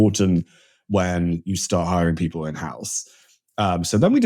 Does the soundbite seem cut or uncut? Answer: uncut